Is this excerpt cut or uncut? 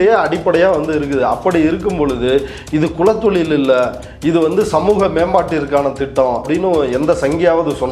cut